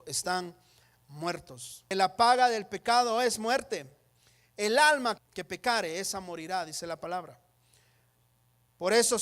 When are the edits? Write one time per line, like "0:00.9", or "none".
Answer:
0:01.9
0:05.2